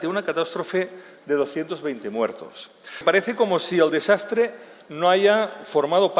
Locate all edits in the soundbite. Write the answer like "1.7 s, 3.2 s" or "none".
3.0 s